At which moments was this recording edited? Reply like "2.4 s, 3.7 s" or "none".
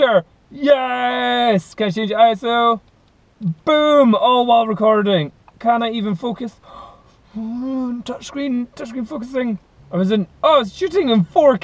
9.7 s